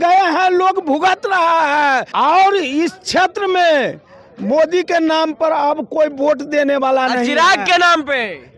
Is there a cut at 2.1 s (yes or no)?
yes